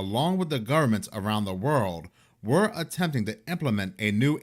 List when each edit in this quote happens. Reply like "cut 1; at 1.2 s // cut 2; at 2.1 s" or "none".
none